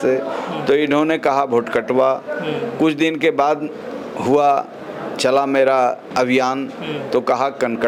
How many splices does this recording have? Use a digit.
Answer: 0